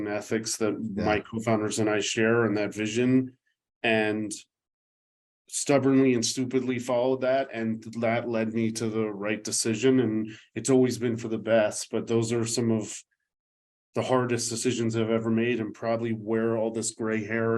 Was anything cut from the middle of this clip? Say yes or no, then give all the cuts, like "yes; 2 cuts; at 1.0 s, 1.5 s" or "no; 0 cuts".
no; 0 cuts